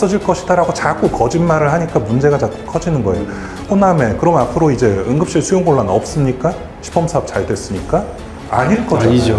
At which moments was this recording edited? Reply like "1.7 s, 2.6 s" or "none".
none